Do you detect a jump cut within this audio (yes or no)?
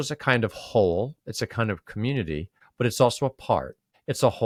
no